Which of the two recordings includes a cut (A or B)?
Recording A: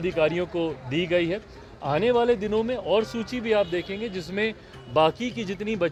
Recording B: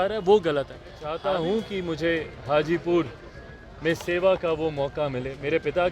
B